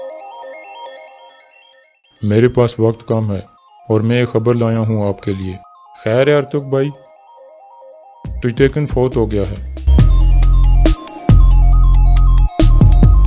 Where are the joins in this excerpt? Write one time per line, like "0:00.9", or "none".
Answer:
none